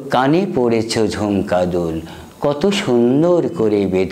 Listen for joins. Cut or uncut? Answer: uncut